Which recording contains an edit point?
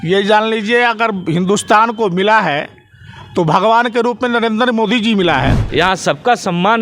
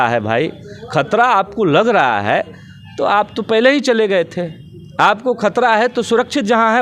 first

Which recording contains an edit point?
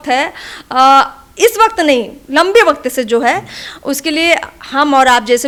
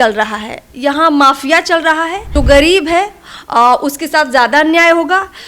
second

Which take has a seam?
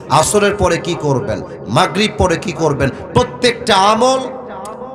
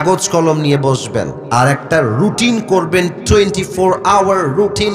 second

